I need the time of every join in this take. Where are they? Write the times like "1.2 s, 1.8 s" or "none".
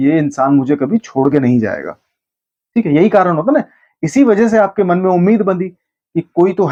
none